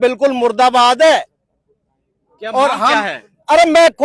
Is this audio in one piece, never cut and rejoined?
yes; 0 cuts

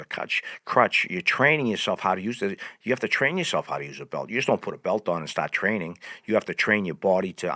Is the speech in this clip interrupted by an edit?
no; 0 cuts

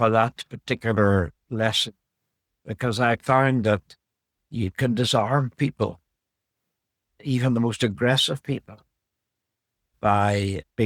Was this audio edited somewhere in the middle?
no; 0 cuts

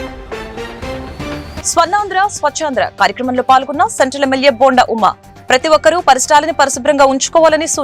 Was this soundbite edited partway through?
yes; 1 cut; at 1.6 s

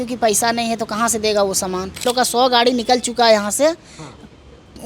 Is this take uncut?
no; 1 cut; at 2.0 s

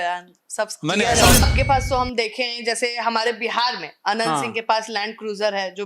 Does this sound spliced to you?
yes; 1 cut; at 1.4 s

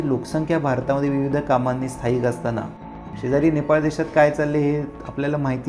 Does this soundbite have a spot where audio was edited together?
no; 0 cuts

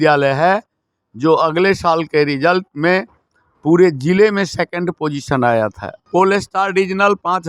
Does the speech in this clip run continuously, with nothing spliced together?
no; 1 cut; at 5.9 s

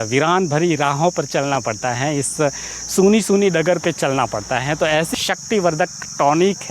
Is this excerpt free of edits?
no; 1 cut; at 5.1 s

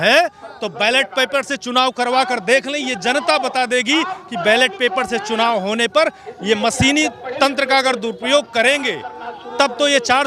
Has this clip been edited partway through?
no; 0 cuts

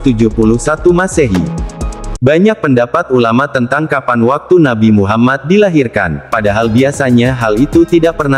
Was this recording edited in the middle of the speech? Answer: yes; 1 cut; at 6.2 s

